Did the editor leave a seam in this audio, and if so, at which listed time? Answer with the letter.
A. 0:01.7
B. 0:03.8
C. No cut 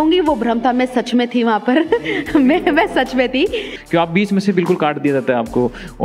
B